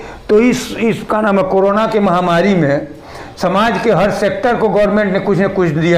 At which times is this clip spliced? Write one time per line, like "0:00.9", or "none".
none